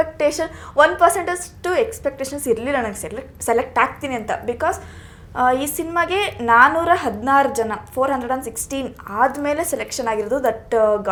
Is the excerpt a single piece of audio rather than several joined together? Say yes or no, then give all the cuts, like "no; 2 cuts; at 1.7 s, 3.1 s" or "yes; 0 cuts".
yes; 0 cuts